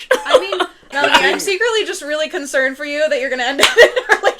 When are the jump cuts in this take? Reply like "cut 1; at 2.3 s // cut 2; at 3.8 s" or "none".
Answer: cut 1; at 0.9 s